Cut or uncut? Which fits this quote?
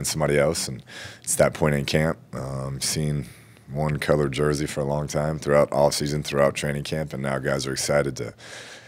uncut